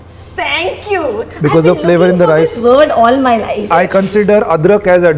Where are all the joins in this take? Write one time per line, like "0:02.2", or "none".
0:03.7